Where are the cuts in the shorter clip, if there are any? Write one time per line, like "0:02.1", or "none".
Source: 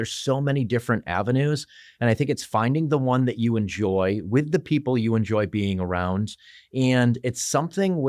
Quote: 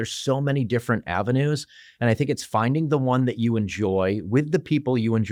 none